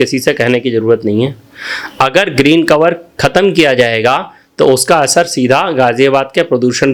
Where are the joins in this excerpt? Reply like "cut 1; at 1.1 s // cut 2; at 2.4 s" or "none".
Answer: none